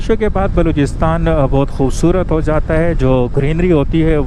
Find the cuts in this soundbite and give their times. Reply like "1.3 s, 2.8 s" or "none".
none